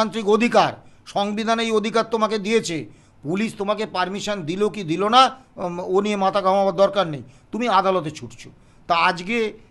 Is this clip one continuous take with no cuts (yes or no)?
yes